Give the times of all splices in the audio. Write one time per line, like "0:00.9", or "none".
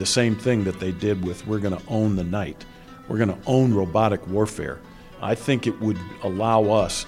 0:05.1